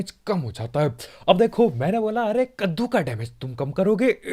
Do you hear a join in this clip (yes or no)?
no